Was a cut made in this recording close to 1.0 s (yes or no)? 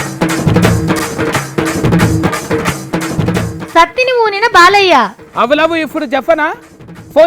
yes